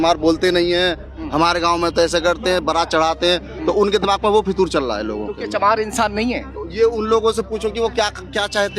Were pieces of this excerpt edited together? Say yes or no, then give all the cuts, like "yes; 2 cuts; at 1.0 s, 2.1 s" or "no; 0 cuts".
no; 0 cuts